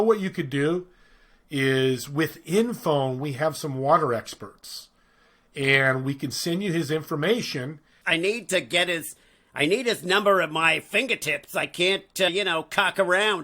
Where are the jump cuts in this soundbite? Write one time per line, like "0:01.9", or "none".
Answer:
0:07.9
0:12.3